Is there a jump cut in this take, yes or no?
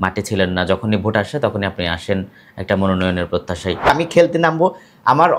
yes